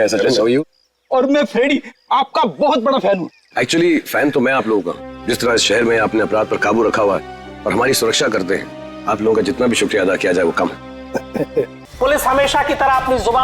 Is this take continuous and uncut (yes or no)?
no